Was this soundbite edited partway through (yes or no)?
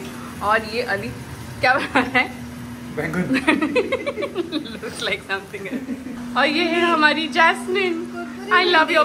no